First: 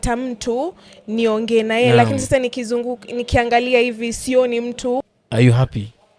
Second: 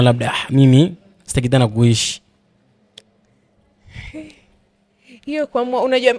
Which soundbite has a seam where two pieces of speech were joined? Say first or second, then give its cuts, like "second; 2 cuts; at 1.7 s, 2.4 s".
first; 1 cut; at 5.1 s